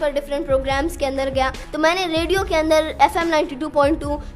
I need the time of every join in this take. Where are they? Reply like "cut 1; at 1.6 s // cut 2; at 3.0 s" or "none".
cut 1; at 1.6 s